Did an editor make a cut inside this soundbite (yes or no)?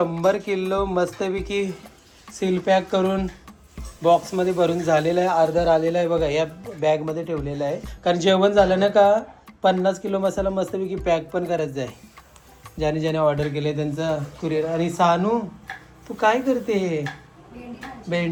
no